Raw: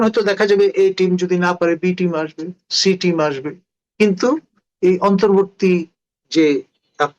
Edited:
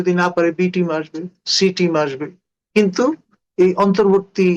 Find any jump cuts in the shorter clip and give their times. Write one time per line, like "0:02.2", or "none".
none